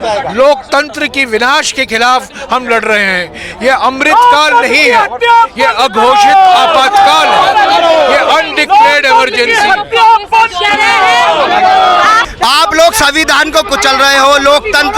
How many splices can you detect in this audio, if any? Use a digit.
0